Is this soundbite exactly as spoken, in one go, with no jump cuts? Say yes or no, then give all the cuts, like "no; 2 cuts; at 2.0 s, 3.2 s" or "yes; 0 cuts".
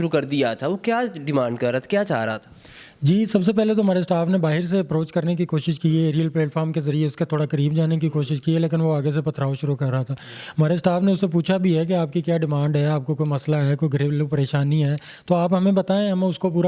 yes; 0 cuts